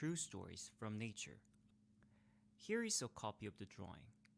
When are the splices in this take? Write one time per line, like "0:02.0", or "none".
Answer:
0:01.6